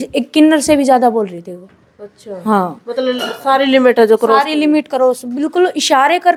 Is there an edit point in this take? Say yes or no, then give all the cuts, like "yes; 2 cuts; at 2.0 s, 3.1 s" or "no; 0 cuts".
no; 0 cuts